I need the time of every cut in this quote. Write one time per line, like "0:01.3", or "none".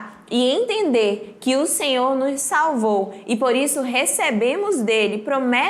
none